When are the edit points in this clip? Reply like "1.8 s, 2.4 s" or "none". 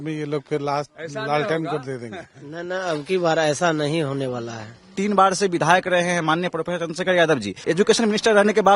4.9 s, 7.6 s